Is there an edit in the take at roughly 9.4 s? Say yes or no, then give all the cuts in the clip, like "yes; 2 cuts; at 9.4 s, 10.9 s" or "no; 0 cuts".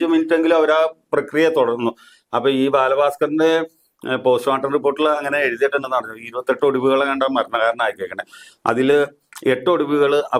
no; 0 cuts